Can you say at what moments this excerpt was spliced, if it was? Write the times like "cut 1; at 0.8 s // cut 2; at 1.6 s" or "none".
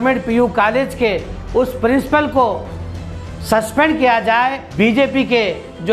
cut 1; at 4.6 s